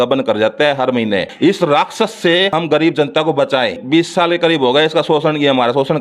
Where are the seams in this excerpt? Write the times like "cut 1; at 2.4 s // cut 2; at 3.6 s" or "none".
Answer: cut 1; at 1.3 s // cut 2; at 2.5 s // cut 3; at 3.8 s

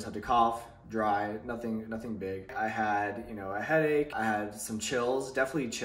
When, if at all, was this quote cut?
cut 1; at 2.5 s // cut 2; at 4.2 s

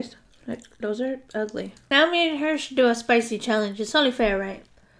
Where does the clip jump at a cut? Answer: cut 1; at 1.8 s

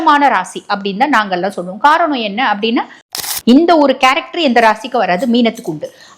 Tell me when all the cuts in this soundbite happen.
cut 1; at 3.0 s

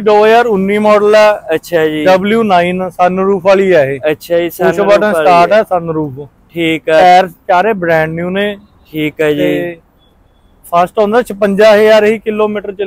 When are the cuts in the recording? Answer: none

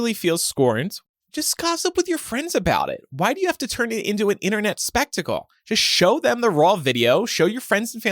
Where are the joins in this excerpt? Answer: cut 1; at 1.0 s

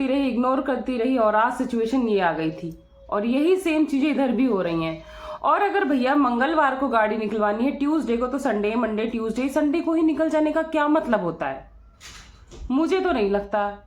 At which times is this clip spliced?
none

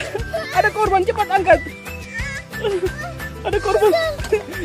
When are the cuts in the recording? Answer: none

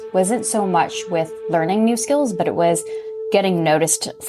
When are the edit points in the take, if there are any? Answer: none

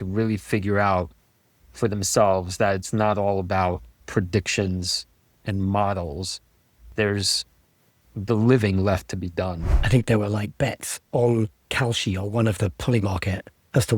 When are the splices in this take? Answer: cut 1; at 3.9 s // cut 2; at 9.7 s // cut 3; at 11.6 s

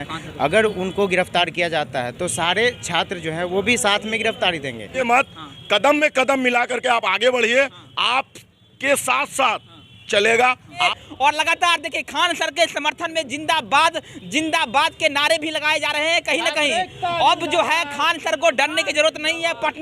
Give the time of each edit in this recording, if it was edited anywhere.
cut 1; at 5.0 s // cut 2; at 10.8 s

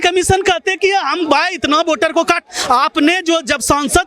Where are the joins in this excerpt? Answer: none

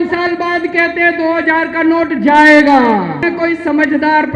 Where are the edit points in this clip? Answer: cut 1; at 3.2 s

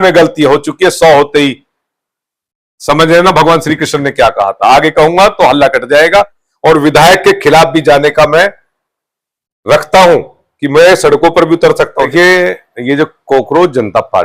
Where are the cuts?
cut 1; at 6.4 s // cut 2; at 12.1 s

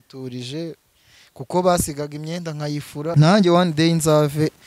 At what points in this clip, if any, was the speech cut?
cut 1; at 3.1 s

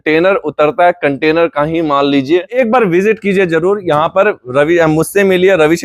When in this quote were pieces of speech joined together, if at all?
cut 1; at 2.5 s

